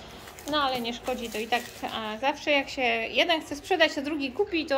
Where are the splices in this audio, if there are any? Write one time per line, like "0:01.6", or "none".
none